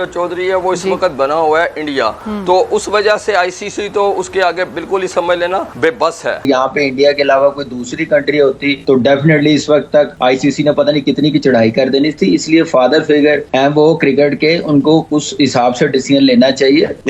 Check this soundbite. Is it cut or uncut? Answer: uncut